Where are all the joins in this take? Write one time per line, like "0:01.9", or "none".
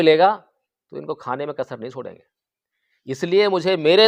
none